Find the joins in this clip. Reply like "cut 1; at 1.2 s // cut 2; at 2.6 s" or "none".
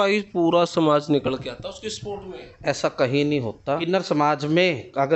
cut 1; at 3.8 s